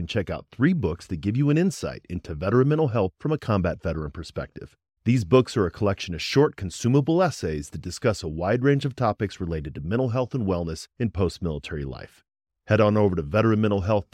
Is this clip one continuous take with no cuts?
yes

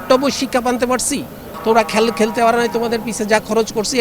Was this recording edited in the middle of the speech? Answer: yes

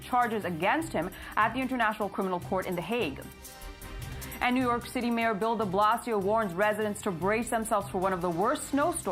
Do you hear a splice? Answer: no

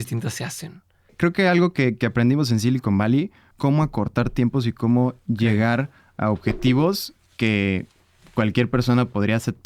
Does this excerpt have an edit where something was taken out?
yes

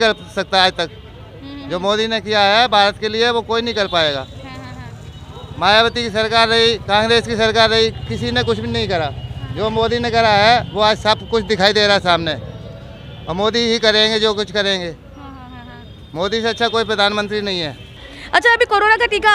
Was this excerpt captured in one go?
yes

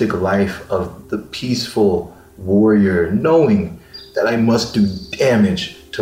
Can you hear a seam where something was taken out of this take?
no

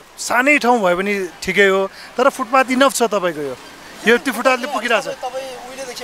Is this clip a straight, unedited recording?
yes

